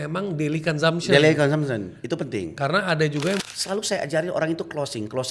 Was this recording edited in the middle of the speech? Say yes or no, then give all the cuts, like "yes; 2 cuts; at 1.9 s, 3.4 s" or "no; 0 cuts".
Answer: yes; 1 cut; at 3.5 s